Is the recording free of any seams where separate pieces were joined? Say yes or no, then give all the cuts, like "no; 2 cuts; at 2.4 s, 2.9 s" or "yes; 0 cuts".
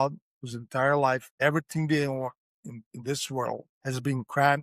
no; 2 cuts; at 1.3 s, 3.7 s